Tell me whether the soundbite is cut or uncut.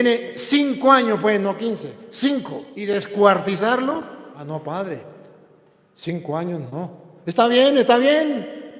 cut